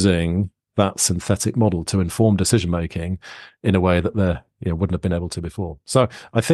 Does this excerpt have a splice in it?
no; 0 cuts

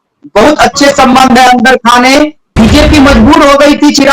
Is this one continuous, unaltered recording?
no; 1 cut; at 2.4 s

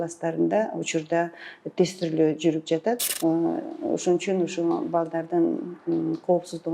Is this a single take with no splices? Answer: no; 1 cut; at 3.1 s

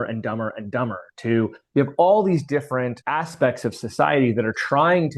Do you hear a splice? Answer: no; 0 cuts

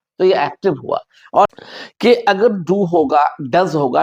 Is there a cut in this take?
yes; 1 cut; at 1.5 s

